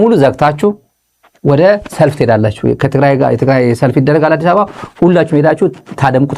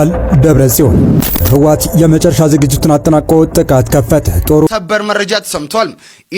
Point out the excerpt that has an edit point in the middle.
second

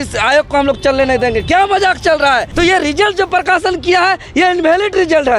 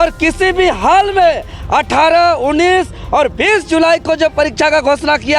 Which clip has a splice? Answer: first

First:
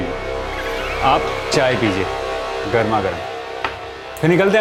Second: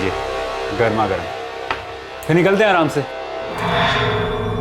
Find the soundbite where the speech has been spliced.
second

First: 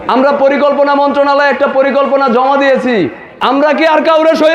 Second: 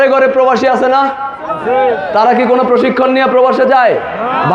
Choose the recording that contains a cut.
first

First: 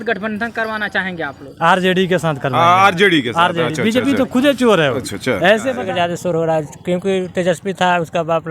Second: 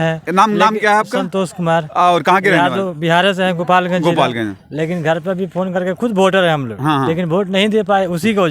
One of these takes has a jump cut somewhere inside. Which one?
first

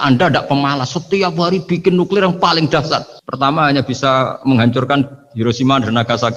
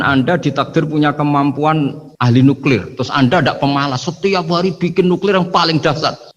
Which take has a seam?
second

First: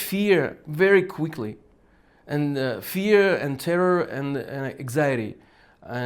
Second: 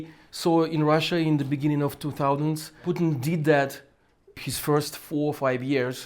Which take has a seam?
second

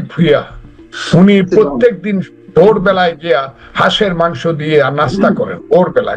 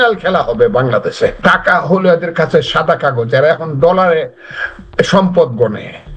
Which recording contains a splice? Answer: second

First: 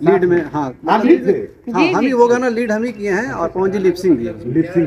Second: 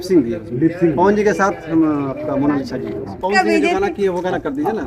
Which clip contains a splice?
second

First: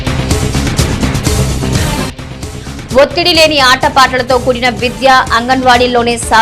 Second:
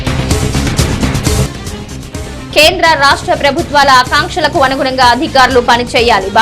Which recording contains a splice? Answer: second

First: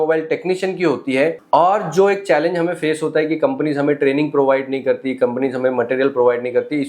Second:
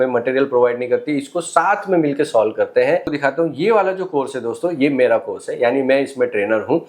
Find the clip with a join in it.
second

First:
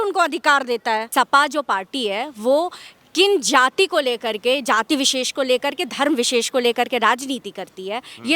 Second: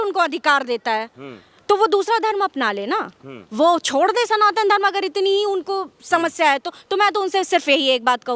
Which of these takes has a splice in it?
first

